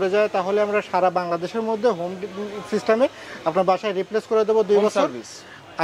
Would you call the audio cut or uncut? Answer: uncut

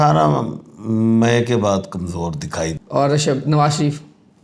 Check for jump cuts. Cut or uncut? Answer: cut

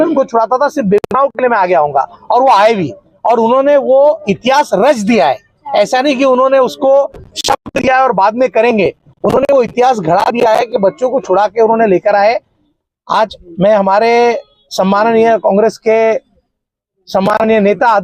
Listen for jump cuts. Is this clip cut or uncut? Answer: uncut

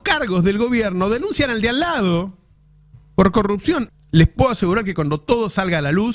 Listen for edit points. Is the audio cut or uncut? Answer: cut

